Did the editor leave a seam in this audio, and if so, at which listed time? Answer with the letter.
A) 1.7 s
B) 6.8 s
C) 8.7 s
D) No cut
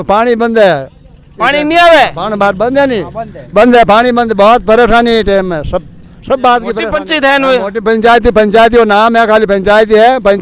B